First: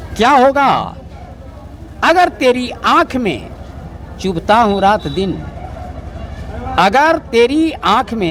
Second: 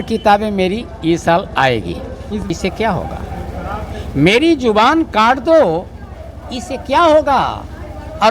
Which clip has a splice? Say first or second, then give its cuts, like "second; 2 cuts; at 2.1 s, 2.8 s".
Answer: second; 1 cut; at 2.5 s